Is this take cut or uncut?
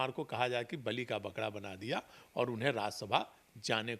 uncut